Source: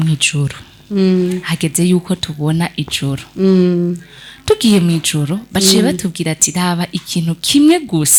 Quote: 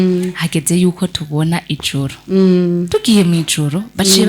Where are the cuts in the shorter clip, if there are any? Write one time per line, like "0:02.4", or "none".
0:02.9